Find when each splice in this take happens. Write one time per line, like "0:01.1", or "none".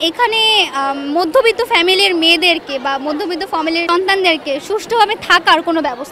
0:03.9

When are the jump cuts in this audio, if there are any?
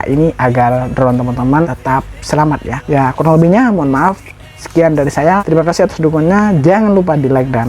0:01.7
0:02.7
0:05.4

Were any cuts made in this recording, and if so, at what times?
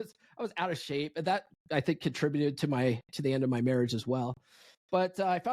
none

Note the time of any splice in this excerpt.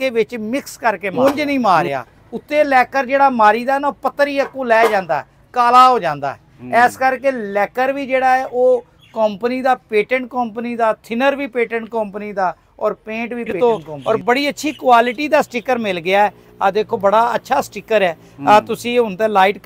0:01.1
0:13.5

